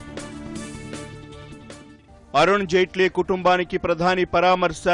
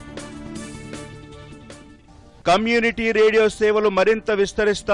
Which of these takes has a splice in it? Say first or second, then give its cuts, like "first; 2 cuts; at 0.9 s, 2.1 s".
second; 1 cut; at 1.9 s